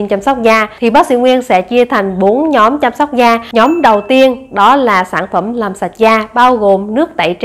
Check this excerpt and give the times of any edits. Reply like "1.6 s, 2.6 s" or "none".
3.4 s